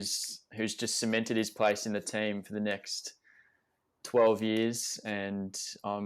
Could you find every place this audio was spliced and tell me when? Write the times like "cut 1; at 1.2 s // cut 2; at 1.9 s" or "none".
none